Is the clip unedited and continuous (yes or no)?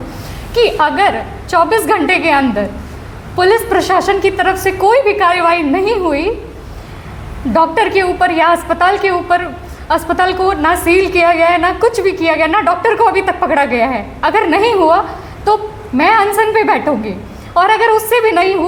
yes